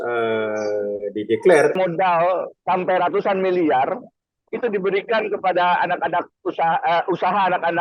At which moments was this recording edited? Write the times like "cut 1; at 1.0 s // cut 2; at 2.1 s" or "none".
cut 1; at 1.8 s